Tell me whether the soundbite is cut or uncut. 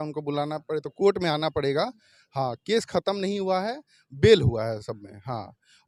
uncut